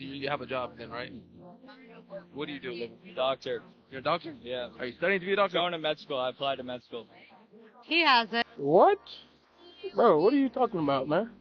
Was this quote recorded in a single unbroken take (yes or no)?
no